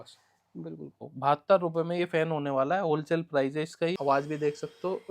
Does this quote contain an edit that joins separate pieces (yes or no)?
yes